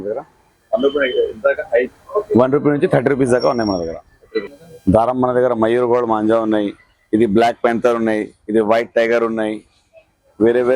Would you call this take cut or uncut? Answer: cut